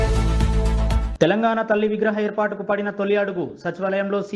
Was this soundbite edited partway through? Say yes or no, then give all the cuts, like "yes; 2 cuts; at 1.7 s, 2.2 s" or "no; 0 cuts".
yes; 1 cut; at 1.1 s